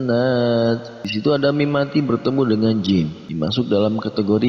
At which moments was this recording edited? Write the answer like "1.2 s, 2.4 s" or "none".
1.0 s, 3.2 s